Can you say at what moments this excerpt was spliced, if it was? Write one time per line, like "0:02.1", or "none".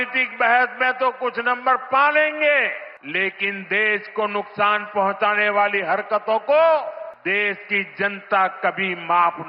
0:02.9
0:07.1